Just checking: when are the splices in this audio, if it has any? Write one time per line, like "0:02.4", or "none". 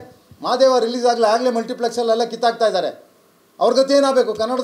none